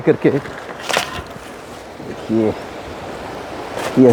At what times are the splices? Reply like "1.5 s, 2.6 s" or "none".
none